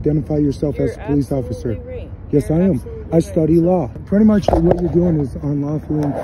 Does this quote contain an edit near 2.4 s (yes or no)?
no